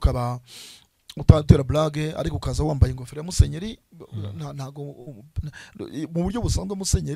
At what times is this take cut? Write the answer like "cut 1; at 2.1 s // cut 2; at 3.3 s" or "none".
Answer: none

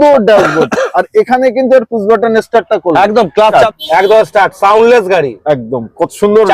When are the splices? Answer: cut 1; at 3.5 s

